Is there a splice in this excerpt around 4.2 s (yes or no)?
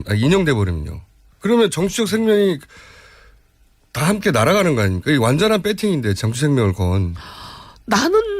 no